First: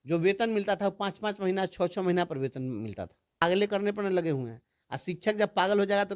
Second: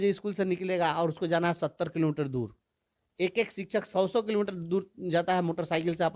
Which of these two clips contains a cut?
first; 1 cut; at 3.4 s

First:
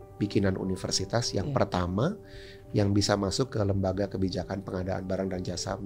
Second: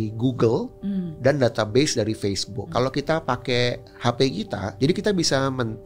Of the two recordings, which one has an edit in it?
second; 2 cuts; at 2.9 s, 4.7 s

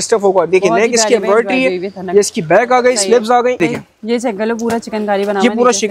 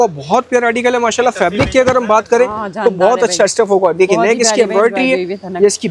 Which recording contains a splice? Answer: first; 1 cut; at 3.6 s

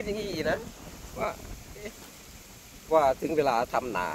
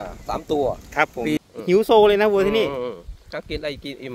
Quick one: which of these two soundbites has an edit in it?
second; 1 cut; at 1.4 s

